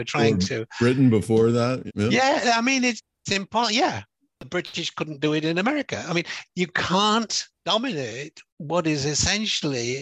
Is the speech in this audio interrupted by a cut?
yes; 1 cut; at 7.4 s

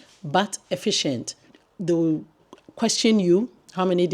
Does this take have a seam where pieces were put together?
yes; 1 cut; at 1.5 s

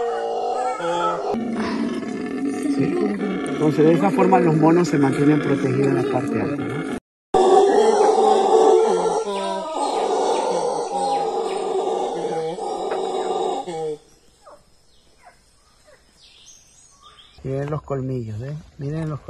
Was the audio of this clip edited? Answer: yes; 1 cut; at 17.2 s

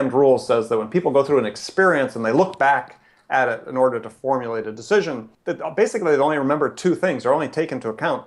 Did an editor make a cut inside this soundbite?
yes; 1 cut; at 5.3 s

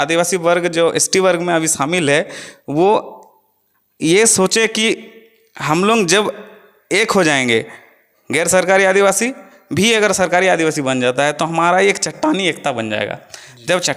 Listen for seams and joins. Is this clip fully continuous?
yes; 0 cuts

